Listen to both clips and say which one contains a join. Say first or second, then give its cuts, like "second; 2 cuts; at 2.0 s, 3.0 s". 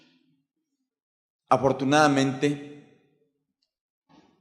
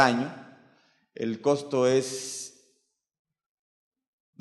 first; 1 cut; at 2.2 s